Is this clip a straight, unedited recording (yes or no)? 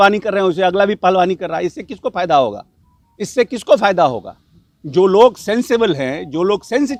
yes